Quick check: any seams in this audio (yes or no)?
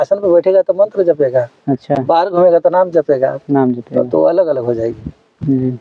no